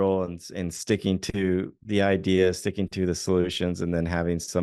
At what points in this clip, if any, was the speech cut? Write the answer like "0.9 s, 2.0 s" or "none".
none